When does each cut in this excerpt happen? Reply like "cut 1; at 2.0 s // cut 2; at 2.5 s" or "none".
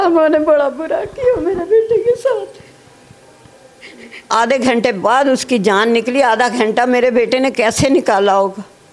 cut 1; at 4.3 s